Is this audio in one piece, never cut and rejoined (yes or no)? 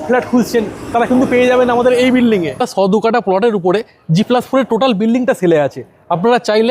no